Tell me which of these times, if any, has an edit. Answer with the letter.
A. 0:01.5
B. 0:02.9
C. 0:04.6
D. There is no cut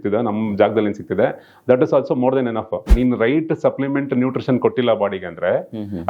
B